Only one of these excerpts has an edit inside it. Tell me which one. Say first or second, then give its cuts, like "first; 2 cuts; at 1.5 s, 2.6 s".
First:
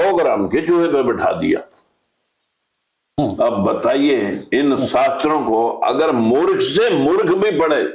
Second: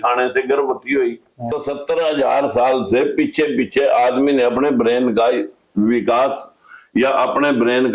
second; 1 cut; at 1.6 s